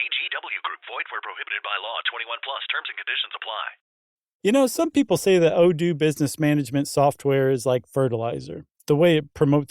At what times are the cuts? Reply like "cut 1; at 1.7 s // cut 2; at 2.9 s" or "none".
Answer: cut 1; at 4.1 s